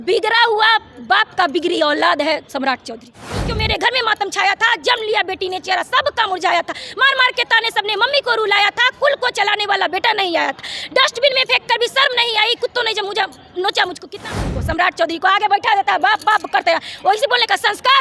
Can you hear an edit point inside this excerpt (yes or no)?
yes